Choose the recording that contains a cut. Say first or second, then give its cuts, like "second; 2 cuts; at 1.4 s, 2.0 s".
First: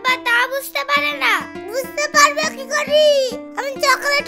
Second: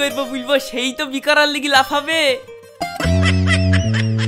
second; 1 cut; at 2.8 s